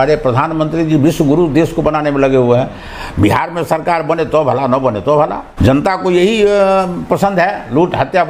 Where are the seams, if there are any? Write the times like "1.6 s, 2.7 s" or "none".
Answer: 5.5 s